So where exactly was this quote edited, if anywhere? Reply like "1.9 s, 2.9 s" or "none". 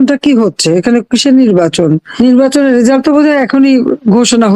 2.1 s